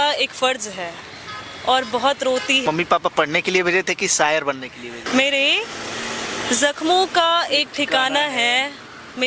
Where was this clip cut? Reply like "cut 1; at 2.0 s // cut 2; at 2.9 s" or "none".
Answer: cut 1; at 2.6 s // cut 2; at 5.0 s